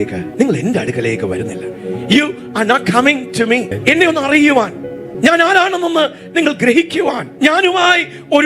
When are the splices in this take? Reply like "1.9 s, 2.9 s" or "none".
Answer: none